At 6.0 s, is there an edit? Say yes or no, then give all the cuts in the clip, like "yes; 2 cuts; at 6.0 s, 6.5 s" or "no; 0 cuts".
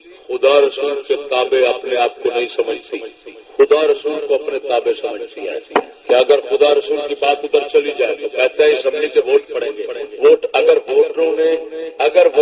no; 0 cuts